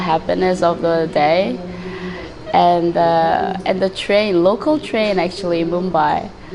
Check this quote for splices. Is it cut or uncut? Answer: uncut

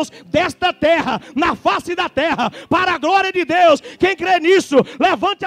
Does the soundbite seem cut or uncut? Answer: uncut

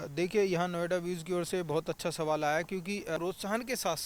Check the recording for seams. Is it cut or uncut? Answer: cut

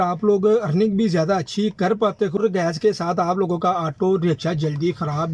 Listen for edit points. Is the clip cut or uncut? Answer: uncut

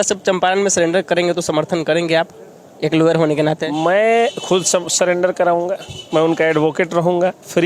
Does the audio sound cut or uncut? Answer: uncut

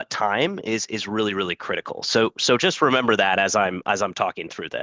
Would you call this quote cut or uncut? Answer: uncut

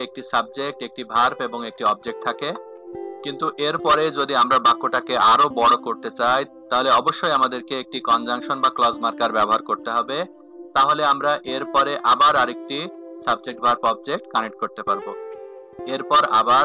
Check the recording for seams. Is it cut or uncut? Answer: cut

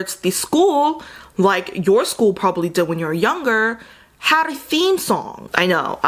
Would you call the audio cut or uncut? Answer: uncut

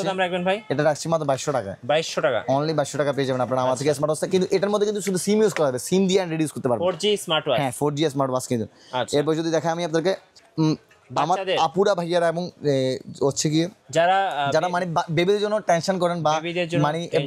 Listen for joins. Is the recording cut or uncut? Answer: uncut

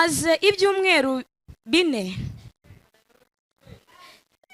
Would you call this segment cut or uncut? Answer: uncut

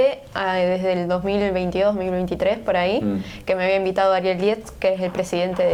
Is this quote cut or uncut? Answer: uncut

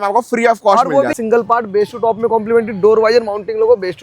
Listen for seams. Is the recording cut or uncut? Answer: cut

